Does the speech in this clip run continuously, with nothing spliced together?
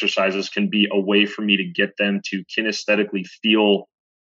yes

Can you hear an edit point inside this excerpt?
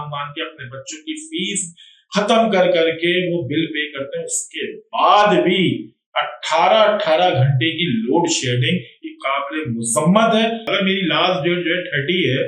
yes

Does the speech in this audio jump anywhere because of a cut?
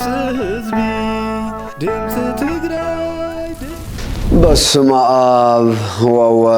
yes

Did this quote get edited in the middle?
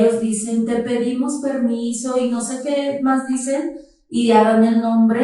no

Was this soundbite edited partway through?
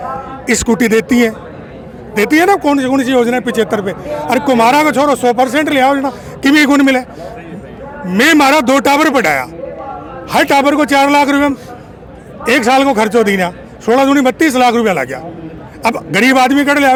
no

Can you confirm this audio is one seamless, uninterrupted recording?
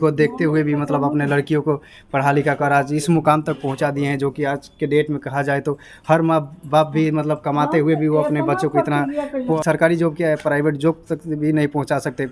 no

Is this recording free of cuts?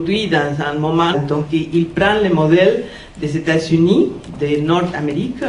yes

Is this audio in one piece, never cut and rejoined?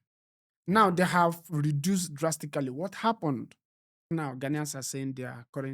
no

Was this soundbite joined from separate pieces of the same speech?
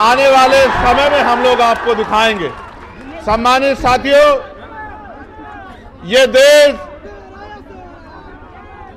no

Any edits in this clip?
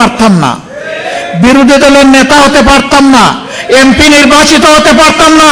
no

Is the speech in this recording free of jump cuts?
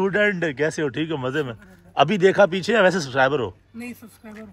yes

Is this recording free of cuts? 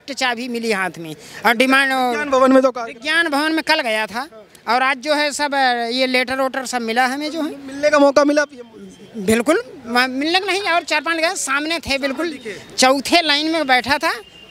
yes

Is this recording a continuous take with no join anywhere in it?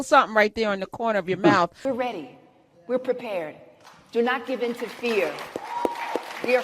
no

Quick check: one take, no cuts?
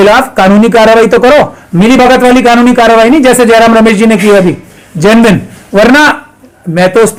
yes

